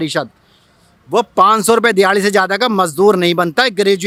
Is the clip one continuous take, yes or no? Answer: yes